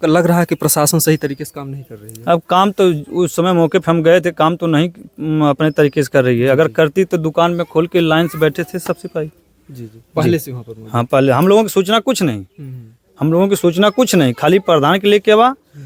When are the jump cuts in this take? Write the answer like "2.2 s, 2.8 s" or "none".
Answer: none